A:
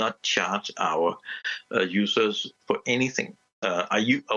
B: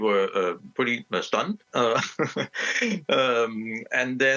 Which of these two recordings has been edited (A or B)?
A